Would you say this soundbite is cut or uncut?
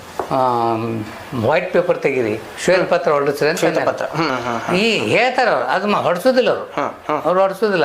cut